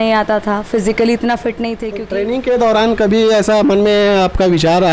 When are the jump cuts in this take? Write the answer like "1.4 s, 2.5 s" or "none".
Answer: 1.8 s